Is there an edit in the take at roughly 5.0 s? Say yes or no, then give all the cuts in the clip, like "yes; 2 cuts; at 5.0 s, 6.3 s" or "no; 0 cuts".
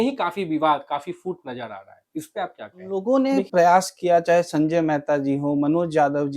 no; 1 cut; at 3.0 s